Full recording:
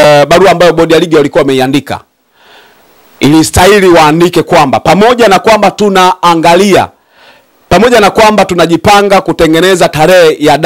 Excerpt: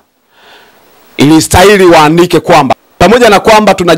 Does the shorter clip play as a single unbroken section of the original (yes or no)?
no